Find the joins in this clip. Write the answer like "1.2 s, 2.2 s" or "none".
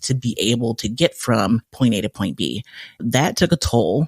none